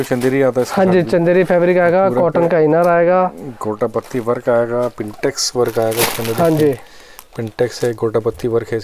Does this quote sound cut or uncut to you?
uncut